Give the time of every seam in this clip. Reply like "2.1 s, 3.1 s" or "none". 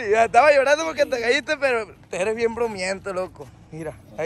none